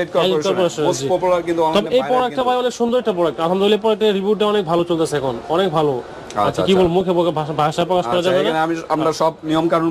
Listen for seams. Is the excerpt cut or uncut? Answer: uncut